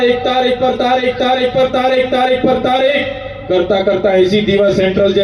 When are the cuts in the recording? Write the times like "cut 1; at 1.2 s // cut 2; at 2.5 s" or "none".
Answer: none